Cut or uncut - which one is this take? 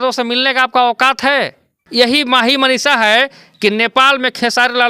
cut